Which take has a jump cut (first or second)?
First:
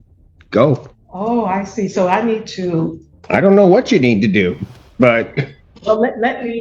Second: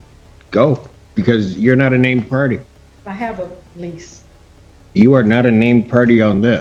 first